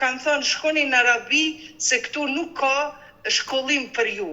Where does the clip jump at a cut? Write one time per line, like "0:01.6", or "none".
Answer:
none